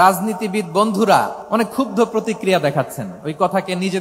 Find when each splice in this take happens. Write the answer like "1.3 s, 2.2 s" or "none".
1.4 s